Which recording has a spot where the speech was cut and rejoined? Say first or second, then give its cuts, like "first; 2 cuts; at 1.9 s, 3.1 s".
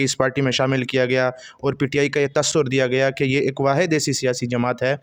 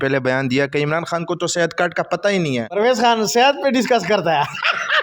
second; 1 cut; at 2.7 s